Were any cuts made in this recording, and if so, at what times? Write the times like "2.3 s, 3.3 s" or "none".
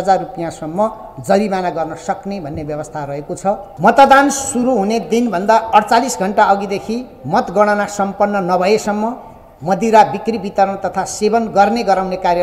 3.7 s